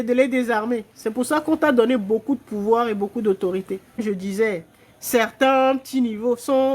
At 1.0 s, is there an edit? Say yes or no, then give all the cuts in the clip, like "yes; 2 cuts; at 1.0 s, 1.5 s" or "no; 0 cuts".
no; 1 cut; at 4.0 s